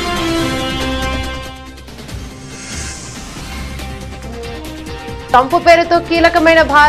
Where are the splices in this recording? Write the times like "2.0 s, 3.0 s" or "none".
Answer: 3.2 s, 4.0 s